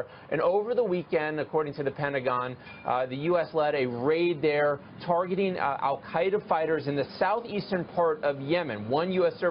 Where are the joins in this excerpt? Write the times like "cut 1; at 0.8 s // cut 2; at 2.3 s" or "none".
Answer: cut 1; at 4.4 s